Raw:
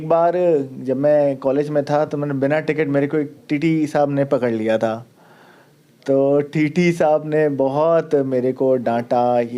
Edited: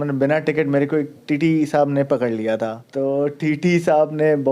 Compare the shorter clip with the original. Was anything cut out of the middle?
yes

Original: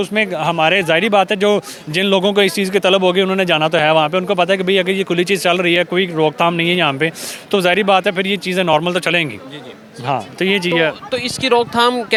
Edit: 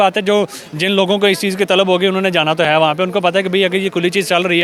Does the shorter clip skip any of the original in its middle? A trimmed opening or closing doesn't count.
no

